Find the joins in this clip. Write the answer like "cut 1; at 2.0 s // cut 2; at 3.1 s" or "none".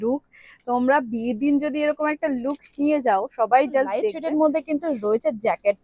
cut 1; at 4.1 s